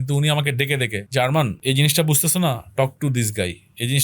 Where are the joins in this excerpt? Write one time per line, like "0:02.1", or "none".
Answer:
0:01.0
0:01.6